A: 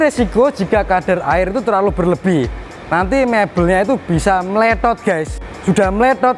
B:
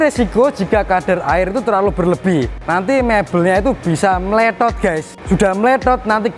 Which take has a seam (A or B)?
B